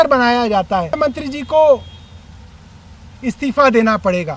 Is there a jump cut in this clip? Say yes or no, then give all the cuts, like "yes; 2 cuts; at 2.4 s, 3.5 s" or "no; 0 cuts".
yes; 1 cut; at 1.0 s